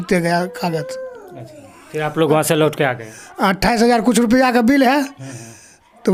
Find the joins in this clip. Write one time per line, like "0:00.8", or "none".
none

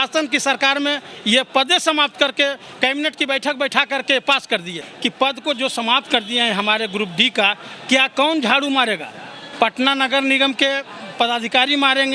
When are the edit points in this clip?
0:04.9

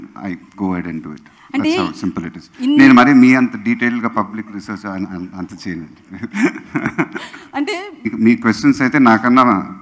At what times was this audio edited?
0:08.1

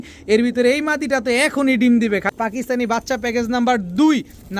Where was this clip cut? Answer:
0:02.2

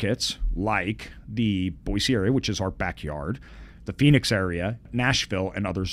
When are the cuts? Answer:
0:04.8

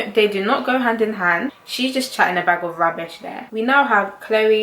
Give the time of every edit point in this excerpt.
0:01.6
0:03.5

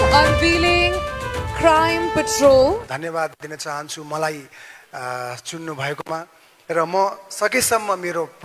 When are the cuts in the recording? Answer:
0:02.9

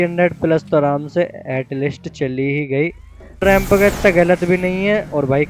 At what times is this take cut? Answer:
0:03.4

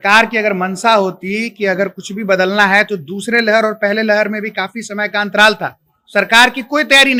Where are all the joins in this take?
none

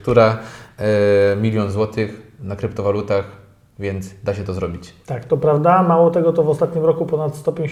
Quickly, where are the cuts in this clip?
none

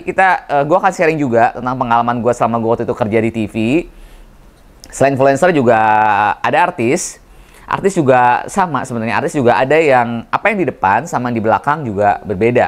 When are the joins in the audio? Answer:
none

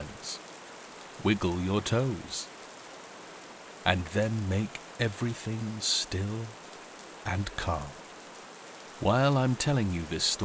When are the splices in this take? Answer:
none

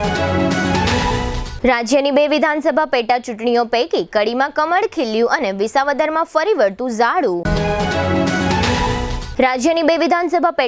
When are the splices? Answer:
0:00.9

